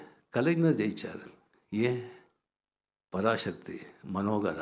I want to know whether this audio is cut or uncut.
uncut